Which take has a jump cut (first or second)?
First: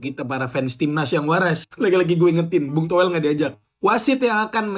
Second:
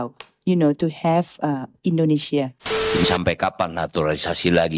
second